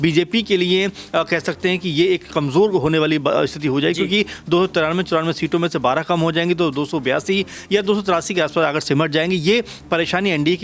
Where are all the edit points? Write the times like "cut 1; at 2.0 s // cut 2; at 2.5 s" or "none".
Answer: none